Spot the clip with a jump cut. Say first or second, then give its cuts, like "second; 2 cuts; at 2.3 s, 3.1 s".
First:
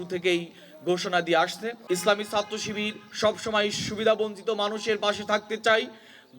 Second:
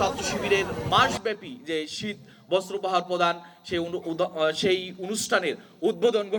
first; 1 cut; at 1.7 s